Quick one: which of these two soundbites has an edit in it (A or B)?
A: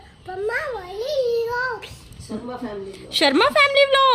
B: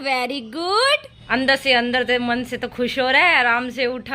B